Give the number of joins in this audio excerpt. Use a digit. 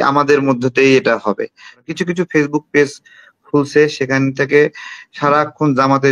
1